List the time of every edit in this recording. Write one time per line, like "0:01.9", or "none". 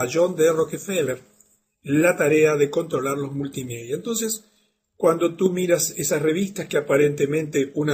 none